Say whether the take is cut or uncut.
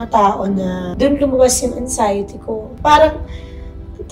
cut